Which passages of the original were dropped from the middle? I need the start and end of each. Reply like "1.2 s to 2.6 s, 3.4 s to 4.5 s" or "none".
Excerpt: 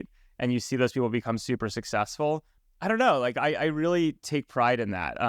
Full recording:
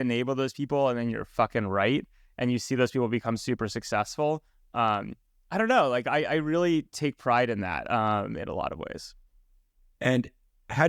4.6 s to 5.3 s